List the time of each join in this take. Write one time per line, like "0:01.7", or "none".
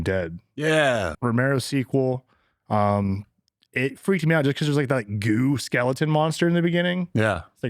0:01.1